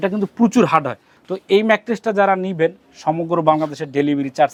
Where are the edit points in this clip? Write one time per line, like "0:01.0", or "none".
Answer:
none